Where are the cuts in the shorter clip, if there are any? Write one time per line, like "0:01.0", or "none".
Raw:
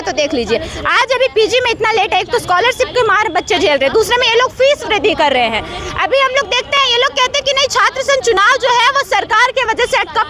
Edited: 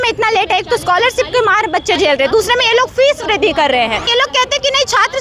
0:04.1

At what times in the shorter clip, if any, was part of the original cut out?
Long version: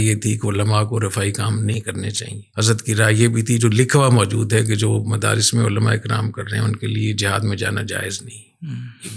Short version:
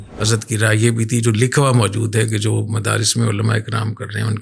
none

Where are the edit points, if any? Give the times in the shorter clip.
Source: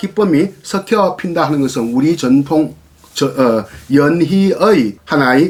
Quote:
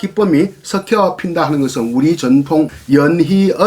0:02.8

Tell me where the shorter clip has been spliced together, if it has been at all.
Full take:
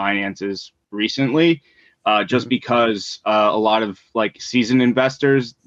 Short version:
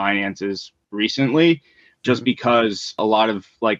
0:02.0
0:03.0

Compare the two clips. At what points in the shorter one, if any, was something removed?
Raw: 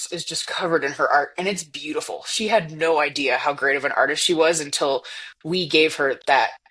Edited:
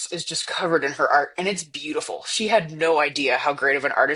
none

